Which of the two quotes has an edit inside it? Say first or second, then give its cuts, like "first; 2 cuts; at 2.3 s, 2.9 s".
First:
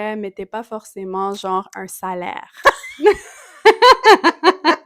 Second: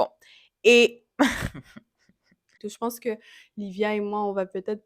second; 1 cut; at 2.6 s